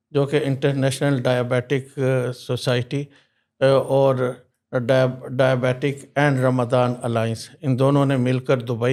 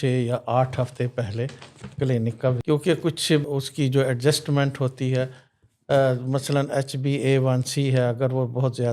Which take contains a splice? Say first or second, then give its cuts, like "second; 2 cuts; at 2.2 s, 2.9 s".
second; 1 cut; at 2.6 s